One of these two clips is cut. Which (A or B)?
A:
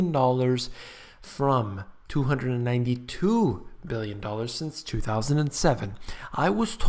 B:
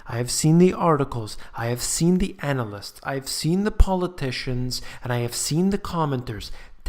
B